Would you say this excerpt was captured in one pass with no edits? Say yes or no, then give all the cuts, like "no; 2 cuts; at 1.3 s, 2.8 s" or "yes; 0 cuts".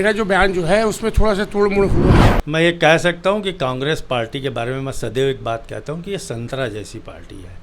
no; 1 cut; at 2.3 s